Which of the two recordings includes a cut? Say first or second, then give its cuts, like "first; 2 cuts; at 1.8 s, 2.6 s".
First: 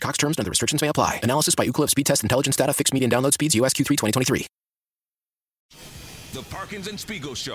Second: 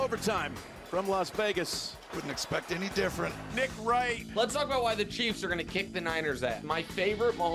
first; 1 cut; at 5.7 s